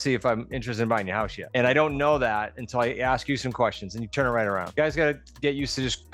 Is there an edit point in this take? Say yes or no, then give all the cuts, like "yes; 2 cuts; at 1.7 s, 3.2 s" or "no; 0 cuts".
yes; 2 cuts; at 1.4 s, 4.7 s